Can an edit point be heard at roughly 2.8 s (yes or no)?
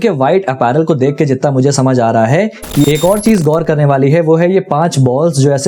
yes